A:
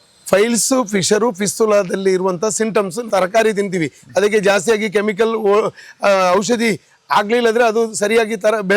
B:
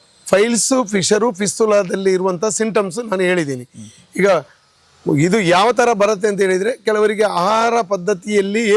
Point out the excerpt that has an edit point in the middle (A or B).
A